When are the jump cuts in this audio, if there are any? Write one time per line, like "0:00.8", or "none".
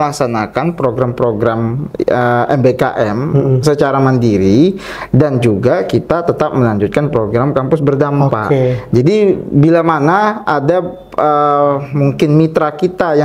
none